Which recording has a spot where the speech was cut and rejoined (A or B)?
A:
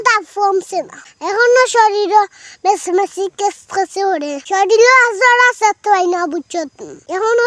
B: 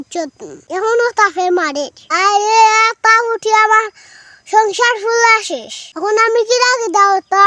B